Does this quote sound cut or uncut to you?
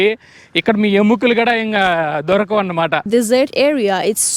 cut